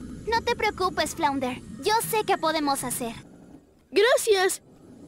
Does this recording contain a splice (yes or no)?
yes